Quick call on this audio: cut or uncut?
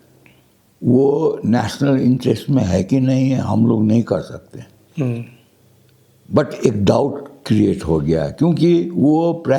uncut